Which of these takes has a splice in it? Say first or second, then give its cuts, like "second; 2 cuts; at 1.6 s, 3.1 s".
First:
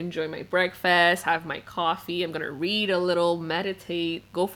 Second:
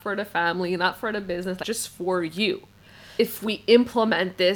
second; 2 cuts; at 1.6 s, 3.2 s